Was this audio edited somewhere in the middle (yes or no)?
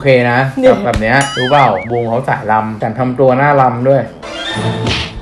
no